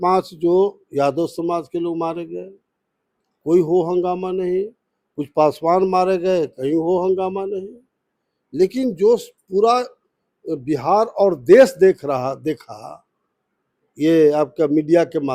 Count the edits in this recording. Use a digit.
0